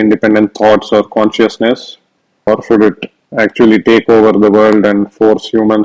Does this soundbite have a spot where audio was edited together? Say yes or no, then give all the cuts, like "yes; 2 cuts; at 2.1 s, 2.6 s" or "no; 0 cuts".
yes; 1 cut; at 2.5 s